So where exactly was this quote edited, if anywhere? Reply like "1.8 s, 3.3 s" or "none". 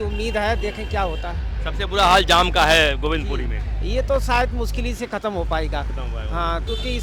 none